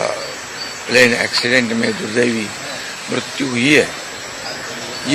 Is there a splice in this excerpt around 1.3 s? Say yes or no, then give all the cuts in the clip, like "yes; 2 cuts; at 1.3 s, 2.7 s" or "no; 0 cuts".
no; 0 cuts